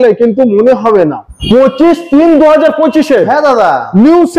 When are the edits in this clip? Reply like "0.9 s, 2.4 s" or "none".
1.3 s